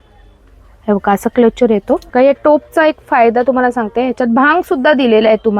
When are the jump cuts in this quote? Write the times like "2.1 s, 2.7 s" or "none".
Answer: 2.1 s